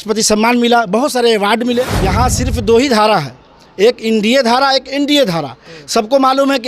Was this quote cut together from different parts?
yes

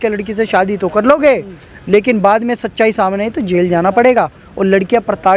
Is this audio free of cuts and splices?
yes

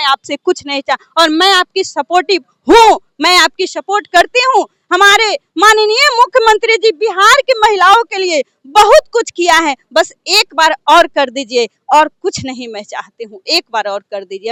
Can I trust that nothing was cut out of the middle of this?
yes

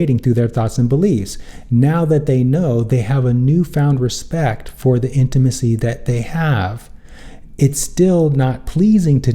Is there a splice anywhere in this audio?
no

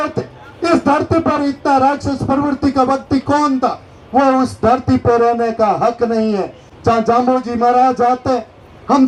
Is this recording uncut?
yes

